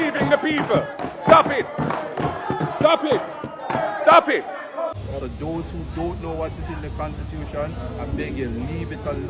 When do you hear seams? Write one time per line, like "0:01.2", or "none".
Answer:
0:04.9